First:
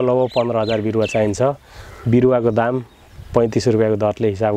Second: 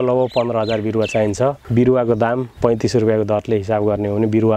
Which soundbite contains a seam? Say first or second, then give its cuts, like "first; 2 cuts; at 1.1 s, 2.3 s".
second; 2 cuts; at 1.6 s, 2.5 s